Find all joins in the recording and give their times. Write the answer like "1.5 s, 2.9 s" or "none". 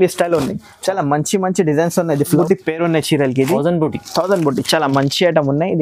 2.4 s